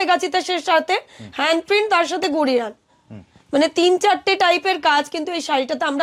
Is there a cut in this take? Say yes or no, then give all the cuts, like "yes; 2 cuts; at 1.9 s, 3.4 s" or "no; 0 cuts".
no; 0 cuts